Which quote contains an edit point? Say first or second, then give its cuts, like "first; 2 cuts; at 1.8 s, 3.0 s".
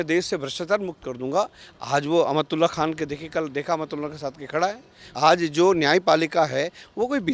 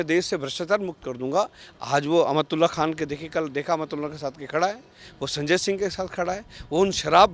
first; 1 cut; at 5.1 s